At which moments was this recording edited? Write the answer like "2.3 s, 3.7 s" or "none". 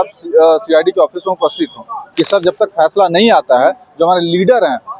2.0 s